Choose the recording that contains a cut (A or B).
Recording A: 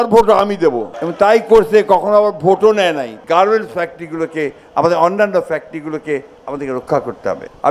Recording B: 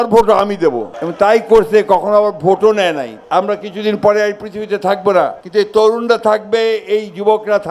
B